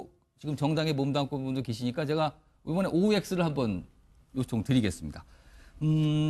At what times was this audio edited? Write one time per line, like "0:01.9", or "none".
0:05.1